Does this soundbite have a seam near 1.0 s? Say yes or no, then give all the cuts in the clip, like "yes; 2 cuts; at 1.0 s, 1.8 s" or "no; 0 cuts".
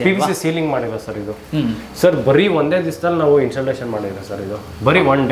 no; 0 cuts